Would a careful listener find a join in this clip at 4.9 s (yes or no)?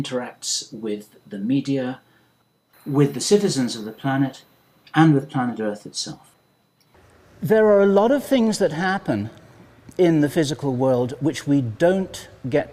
no